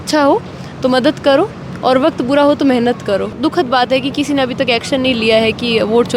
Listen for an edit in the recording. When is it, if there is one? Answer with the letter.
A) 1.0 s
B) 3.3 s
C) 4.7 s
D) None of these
B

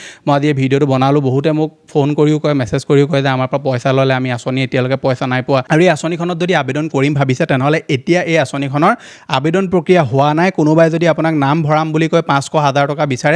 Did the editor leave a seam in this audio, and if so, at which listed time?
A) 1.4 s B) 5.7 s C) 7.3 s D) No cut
B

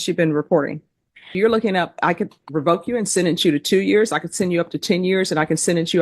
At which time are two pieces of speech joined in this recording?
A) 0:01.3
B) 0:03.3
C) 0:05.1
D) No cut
A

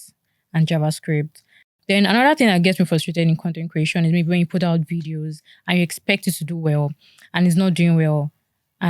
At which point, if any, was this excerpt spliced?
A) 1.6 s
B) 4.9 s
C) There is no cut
A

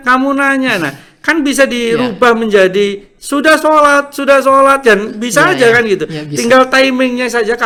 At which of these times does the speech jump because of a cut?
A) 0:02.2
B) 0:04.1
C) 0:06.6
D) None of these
D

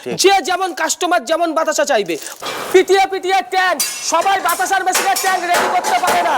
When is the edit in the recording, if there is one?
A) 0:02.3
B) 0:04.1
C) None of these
A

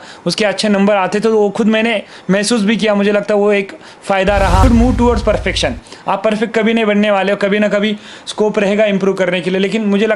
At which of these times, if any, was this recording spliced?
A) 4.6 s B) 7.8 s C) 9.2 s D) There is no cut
A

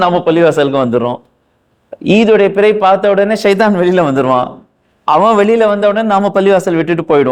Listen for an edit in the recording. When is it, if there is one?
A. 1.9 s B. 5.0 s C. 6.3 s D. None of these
D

